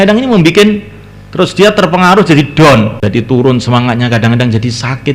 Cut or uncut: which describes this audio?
cut